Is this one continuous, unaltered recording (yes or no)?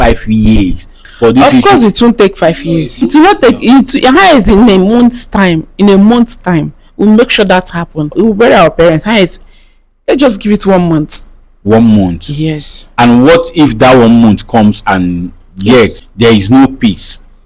no